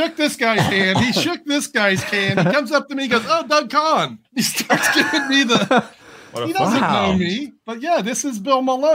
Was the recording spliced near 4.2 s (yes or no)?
yes